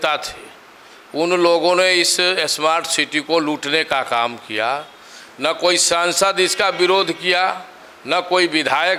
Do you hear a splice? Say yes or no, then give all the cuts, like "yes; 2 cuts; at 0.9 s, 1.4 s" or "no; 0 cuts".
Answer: no; 0 cuts